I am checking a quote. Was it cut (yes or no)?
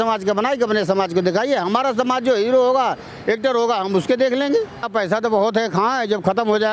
yes